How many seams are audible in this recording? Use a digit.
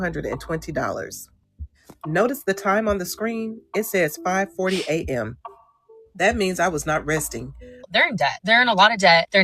1